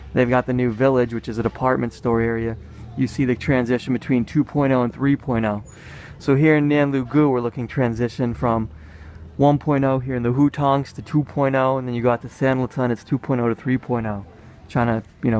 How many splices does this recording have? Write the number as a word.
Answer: one